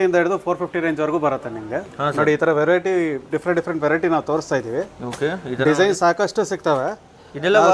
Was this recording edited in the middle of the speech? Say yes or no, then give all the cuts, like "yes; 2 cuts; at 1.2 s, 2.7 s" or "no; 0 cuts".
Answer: no; 0 cuts